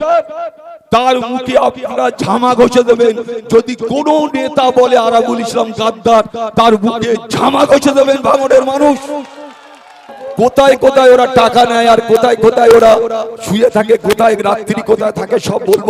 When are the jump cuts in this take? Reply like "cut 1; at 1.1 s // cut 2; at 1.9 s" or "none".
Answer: cut 1; at 10.2 s